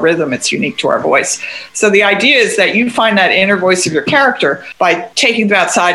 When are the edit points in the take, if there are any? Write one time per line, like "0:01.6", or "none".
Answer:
0:04.9